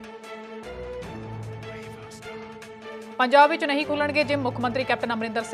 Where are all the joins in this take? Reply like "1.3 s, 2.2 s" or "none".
none